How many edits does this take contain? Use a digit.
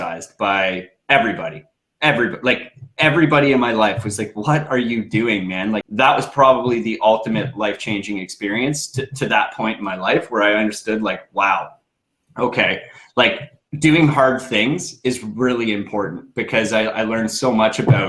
1